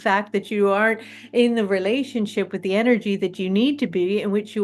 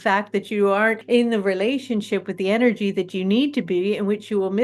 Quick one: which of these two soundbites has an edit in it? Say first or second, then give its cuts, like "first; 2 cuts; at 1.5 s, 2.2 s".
second; 1 cut; at 1.0 s